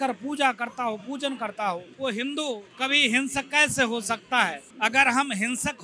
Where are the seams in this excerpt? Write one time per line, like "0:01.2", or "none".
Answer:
0:01.9
0:02.7
0:04.6